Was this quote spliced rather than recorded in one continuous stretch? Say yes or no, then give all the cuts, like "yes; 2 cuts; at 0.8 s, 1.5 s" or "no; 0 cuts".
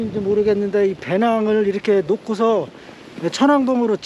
no; 0 cuts